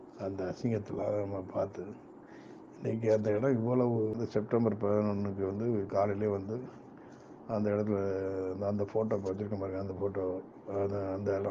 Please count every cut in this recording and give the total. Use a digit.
1